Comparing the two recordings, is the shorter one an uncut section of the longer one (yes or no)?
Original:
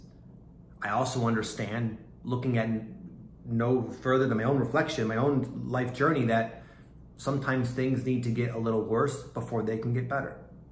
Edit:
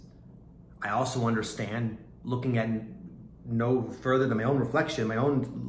yes